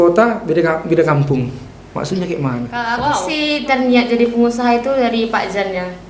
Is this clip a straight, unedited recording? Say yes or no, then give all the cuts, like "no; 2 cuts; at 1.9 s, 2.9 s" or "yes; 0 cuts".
no; 1 cut; at 2.8 s